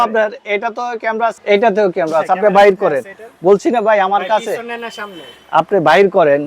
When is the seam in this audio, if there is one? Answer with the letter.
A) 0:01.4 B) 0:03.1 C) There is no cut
A